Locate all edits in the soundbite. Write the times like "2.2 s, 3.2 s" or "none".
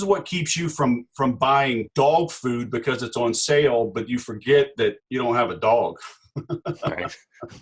1.9 s, 5.0 s